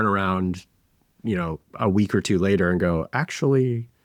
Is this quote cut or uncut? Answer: uncut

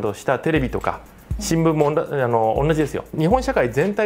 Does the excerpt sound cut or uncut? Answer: cut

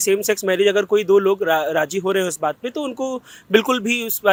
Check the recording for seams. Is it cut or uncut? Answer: uncut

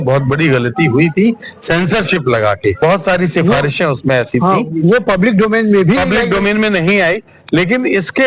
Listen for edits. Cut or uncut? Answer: cut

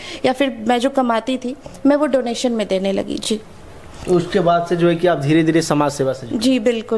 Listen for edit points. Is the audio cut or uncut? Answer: uncut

